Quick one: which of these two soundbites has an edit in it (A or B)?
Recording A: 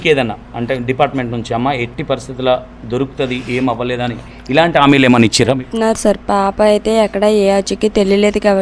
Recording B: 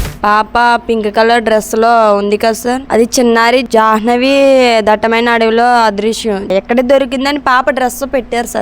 B